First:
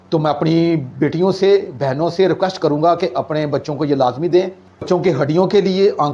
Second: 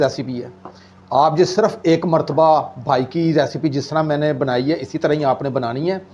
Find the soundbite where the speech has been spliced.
first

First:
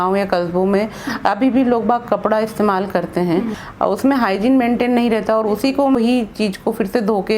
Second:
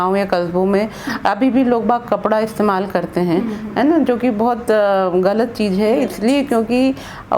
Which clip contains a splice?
first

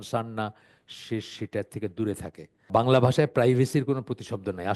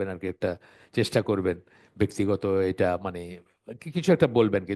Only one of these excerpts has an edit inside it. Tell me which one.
first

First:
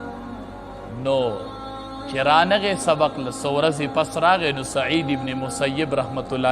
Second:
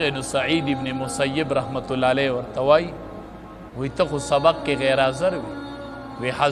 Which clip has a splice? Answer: first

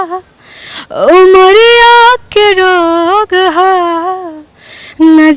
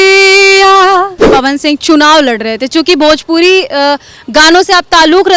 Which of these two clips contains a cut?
second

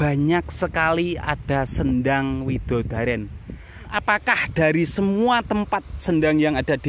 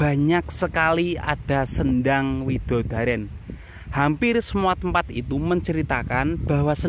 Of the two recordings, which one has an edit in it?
first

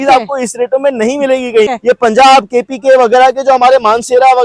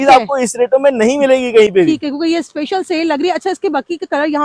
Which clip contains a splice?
first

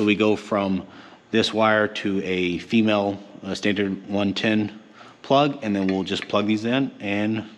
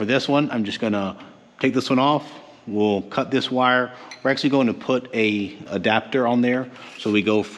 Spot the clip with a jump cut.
second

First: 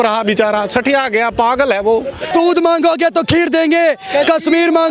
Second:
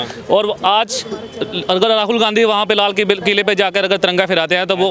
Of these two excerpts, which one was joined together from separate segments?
first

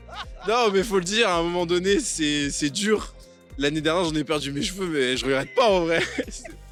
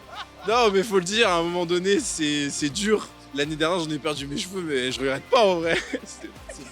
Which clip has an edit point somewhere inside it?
second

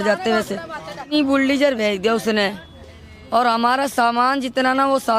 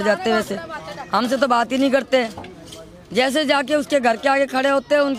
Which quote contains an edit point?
first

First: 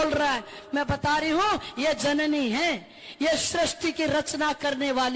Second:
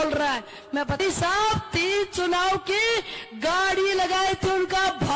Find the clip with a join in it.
second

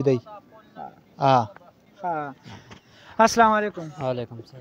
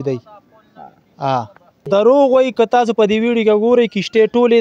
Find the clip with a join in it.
second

